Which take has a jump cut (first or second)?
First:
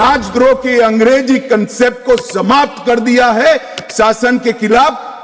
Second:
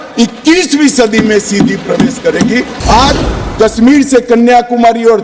second